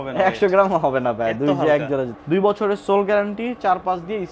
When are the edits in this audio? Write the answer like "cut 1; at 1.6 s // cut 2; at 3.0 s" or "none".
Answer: cut 1; at 2.1 s